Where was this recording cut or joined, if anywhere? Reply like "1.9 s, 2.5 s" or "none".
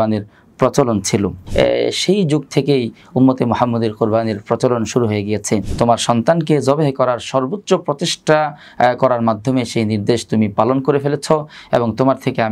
1.4 s, 5.7 s

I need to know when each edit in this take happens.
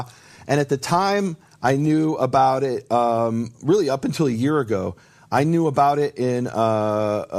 none

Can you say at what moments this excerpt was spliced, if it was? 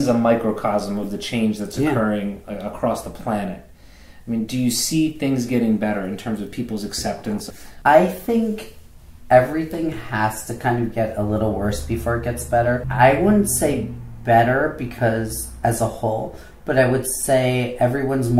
7.4 s, 12.8 s

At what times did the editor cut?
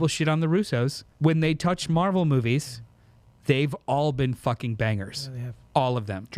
1.0 s

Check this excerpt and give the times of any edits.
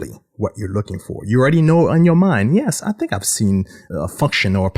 3.8 s

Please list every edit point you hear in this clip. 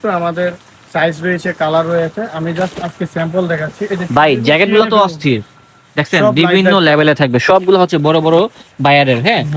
none

